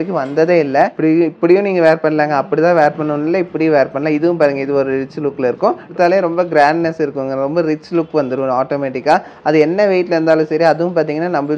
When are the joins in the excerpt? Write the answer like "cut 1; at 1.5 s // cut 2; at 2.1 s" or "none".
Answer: cut 1; at 0.9 s // cut 2; at 5.9 s